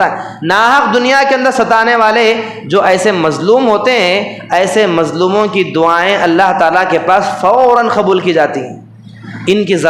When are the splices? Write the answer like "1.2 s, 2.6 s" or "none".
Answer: none